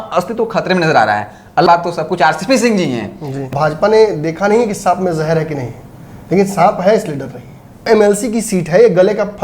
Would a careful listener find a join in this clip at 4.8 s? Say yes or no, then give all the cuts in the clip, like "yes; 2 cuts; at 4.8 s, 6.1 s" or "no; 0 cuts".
no; 3 cuts; at 1.7 s, 3.5 s, 7.8 s